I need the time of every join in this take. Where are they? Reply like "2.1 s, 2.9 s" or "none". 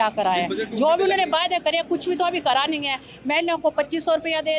none